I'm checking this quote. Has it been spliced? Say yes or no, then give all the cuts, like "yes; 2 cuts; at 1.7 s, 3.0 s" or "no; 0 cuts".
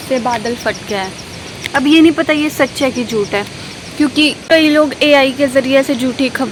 no; 0 cuts